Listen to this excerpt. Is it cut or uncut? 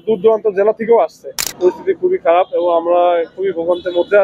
cut